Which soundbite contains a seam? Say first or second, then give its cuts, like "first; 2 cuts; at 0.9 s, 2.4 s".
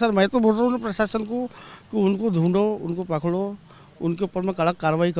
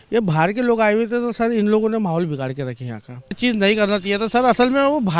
second; 1 cut; at 3.4 s